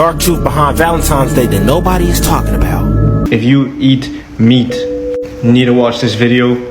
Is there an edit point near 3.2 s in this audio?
yes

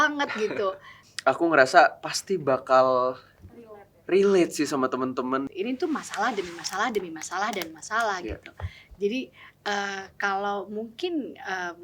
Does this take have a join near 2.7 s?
no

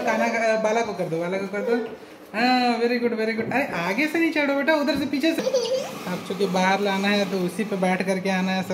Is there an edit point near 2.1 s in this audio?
no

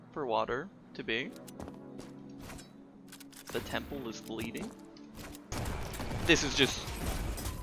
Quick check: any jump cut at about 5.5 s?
yes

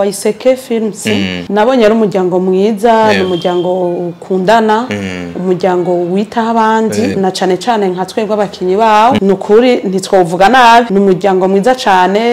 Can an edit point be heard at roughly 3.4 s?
no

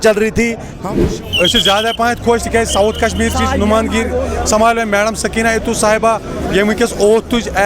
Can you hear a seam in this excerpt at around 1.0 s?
yes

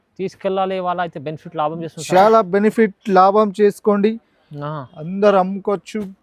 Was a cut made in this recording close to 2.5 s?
no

